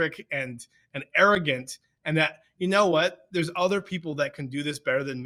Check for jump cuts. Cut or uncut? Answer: uncut